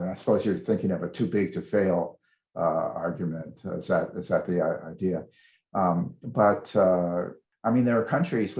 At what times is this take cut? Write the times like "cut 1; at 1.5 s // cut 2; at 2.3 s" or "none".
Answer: cut 1; at 7.4 s